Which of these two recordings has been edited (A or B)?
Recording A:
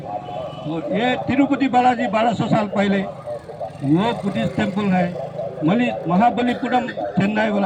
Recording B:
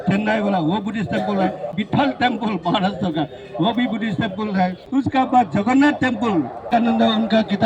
B